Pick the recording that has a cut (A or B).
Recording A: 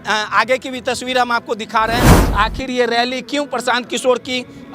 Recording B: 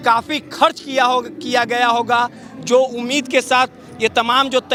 A